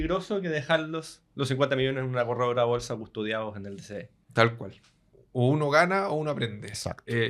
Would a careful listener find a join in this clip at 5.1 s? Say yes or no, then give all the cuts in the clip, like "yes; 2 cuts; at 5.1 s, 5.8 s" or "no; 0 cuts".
yes; 1 cut; at 5.1 s